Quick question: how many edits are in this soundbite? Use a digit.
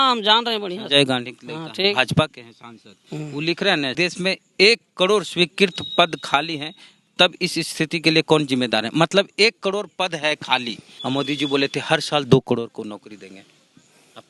2